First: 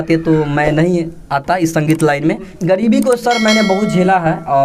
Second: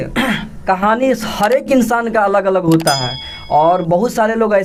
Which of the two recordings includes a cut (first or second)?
first